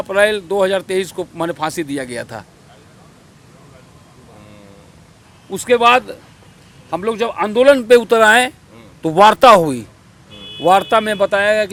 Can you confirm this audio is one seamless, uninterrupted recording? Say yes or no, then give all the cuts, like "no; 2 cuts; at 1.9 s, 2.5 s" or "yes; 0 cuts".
yes; 0 cuts